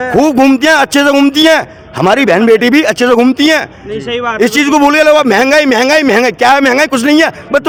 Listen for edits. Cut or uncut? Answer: uncut